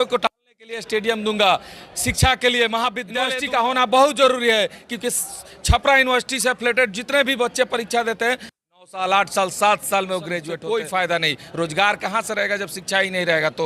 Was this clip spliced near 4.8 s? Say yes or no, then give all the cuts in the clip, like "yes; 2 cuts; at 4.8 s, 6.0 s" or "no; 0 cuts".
no; 2 cuts; at 3.1 s, 10.5 s